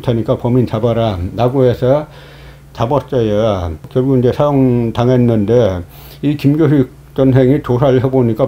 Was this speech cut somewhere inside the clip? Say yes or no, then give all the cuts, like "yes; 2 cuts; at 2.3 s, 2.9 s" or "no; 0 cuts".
yes; 1 cut; at 3.9 s